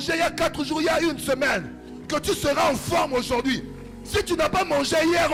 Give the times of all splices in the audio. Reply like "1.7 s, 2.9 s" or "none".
none